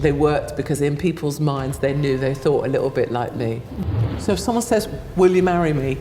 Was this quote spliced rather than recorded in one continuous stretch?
yes; 1 cut; at 3.8 s

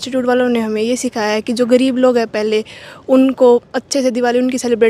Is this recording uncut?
yes; 0 cuts

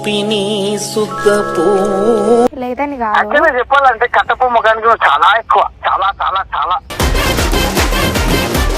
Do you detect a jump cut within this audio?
yes; 1 cut; at 2.5 s

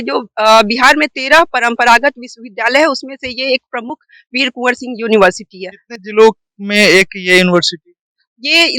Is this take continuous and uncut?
yes; 0 cuts

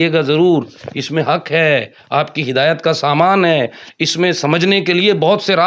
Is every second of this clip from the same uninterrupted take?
yes; 0 cuts

